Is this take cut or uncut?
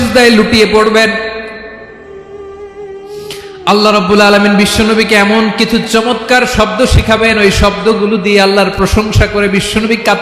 cut